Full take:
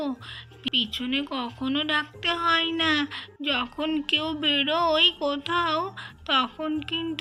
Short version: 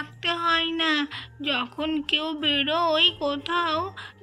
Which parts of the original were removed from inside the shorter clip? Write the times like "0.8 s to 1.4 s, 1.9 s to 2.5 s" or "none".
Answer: none